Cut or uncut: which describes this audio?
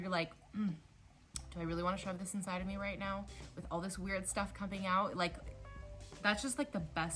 uncut